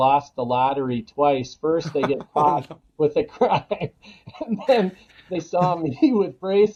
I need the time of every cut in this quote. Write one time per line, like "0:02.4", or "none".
none